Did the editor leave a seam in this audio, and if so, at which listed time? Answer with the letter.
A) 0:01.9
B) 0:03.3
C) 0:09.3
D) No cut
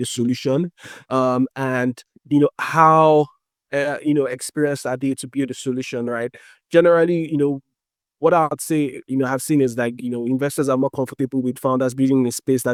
D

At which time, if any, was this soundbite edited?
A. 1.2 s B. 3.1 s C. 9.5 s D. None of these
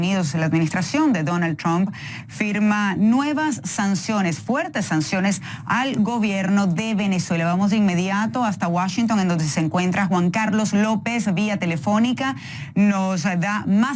C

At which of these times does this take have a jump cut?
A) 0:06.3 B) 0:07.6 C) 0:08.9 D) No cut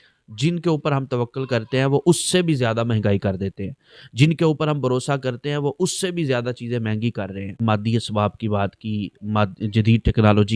B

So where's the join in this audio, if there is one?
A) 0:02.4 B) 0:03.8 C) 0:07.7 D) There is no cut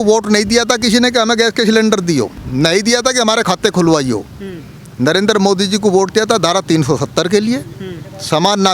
A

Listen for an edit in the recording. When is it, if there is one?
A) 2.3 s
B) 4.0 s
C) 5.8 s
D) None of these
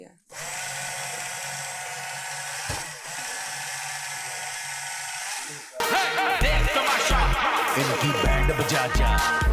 C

